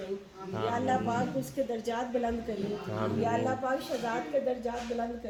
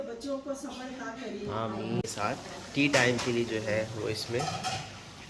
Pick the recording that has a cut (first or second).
second